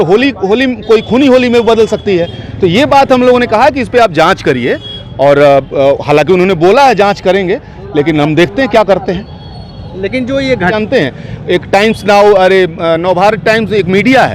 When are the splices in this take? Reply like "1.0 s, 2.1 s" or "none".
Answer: 10.8 s